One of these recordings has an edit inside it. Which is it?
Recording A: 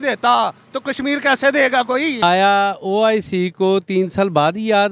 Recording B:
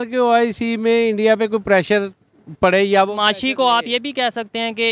A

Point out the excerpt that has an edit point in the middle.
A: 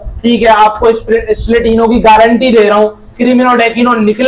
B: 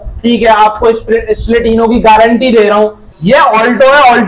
B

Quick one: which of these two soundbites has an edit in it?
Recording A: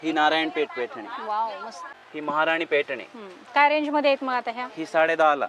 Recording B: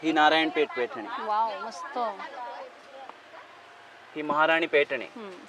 A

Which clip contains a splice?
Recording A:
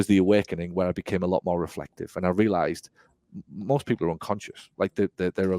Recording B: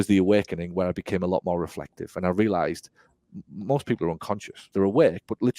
B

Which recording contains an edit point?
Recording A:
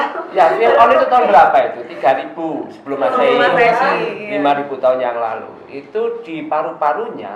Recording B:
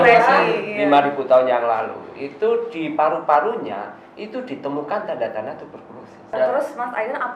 B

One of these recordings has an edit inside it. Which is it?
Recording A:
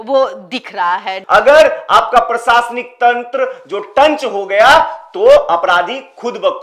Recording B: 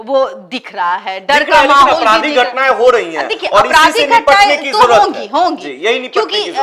A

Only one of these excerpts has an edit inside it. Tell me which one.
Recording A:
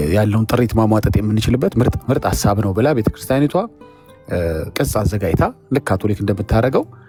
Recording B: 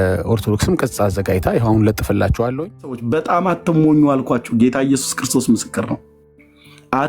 B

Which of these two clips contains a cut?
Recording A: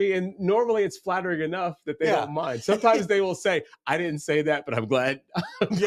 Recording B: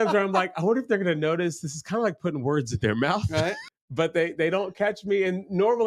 B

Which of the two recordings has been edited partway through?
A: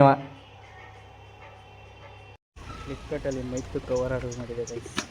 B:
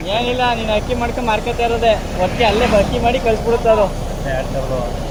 A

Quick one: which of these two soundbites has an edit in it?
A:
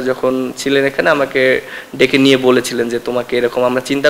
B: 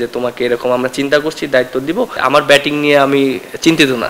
B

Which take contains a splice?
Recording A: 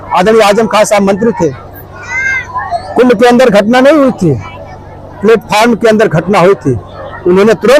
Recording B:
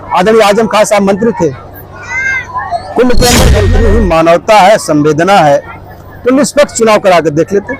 B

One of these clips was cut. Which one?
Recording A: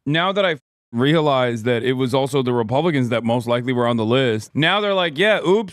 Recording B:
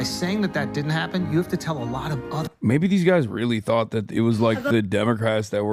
A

